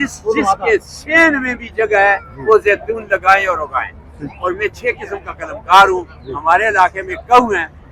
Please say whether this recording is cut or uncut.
uncut